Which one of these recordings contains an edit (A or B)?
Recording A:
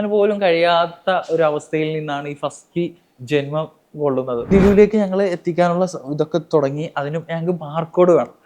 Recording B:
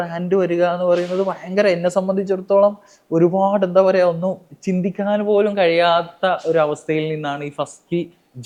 A